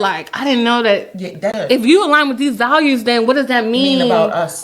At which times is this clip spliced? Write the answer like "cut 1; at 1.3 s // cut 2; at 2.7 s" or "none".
cut 1; at 1.6 s